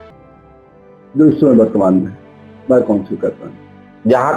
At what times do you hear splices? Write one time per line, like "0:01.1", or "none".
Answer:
0:01.1